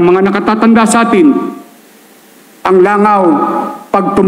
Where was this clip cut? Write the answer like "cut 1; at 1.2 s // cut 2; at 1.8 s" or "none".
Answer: none